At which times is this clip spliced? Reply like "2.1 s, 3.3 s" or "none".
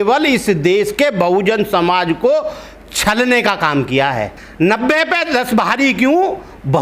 4.4 s